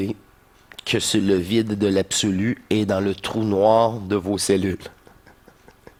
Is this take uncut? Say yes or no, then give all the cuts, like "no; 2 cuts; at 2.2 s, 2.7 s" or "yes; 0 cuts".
yes; 0 cuts